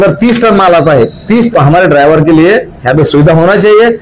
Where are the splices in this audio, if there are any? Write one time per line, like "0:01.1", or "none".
0:01.5